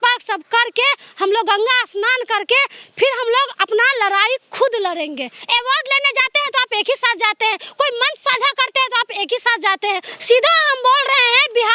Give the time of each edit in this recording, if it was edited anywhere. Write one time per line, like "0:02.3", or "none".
0:05.3
0:10.1